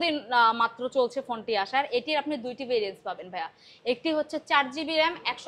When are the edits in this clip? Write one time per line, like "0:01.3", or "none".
none